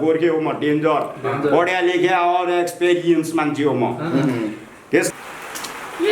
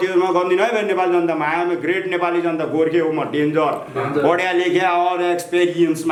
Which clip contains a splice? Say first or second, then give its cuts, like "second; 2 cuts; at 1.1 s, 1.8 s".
first; 1 cut; at 5.1 s